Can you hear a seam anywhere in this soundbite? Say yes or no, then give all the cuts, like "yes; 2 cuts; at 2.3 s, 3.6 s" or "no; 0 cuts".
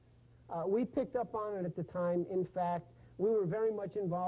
yes; 1 cut; at 2.2 s